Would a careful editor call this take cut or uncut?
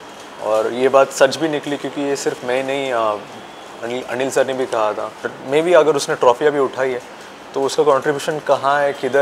cut